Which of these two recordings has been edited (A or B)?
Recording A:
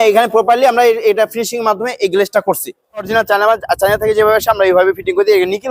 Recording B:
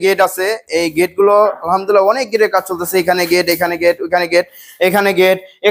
A